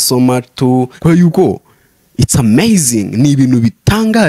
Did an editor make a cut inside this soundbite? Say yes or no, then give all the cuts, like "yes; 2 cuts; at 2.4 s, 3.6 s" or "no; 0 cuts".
yes; 1 cut; at 0.9 s